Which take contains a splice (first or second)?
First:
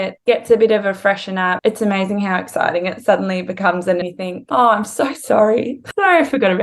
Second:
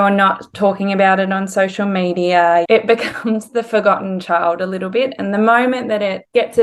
first